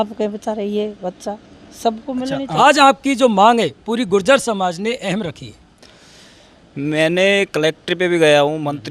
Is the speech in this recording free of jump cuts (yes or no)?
no